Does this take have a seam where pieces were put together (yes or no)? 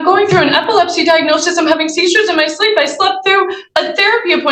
no